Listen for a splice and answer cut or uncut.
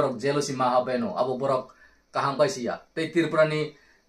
uncut